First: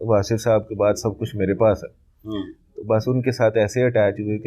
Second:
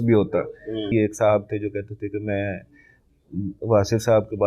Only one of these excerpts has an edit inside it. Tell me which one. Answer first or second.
second